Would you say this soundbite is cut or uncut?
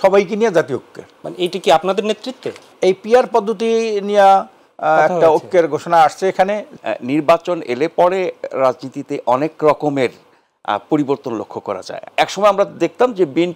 cut